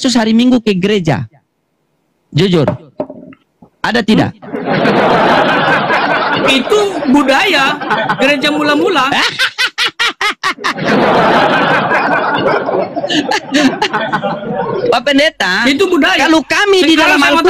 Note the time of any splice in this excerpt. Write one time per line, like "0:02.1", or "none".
none